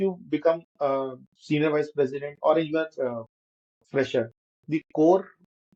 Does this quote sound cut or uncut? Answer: uncut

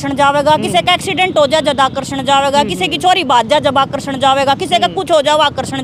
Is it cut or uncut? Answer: uncut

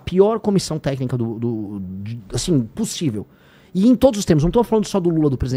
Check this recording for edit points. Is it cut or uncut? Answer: uncut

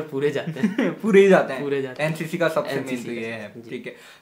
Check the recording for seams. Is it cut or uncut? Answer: uncut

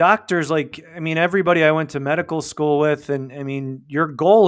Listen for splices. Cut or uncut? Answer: uncut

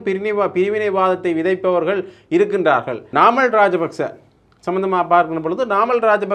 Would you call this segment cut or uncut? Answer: cut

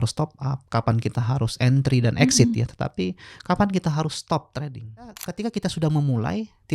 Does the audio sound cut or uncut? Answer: cut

